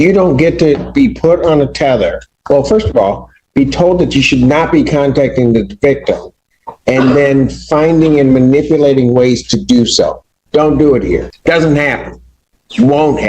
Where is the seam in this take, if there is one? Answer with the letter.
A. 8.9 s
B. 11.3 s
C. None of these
B